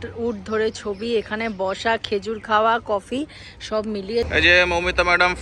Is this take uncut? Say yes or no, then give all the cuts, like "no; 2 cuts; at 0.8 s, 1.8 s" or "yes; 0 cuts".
no; 1 cut; at 4.3 s